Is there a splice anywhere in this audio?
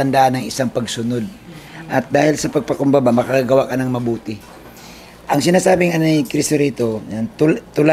no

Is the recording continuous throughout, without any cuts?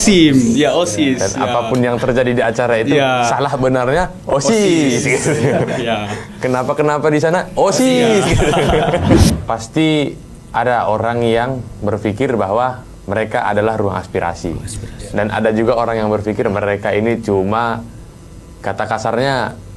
no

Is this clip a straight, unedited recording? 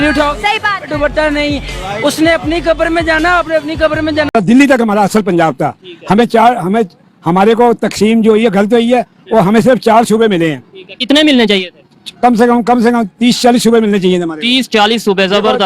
yes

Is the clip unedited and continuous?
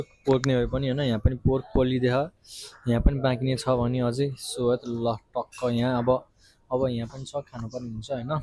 yes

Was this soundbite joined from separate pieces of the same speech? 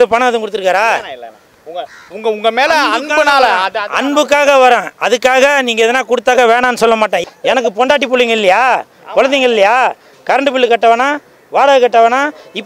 yes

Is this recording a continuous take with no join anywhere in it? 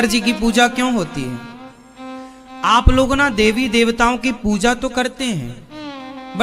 yes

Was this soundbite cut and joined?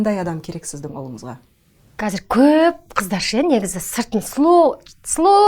yes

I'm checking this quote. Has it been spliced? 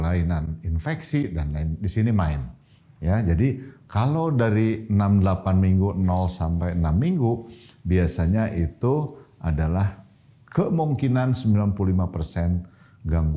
no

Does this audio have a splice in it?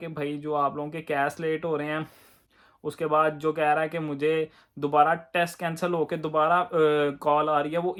no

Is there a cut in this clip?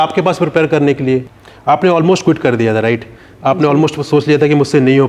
yes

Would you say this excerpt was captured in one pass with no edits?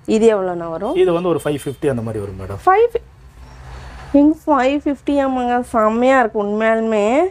yes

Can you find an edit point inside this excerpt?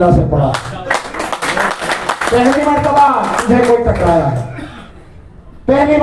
no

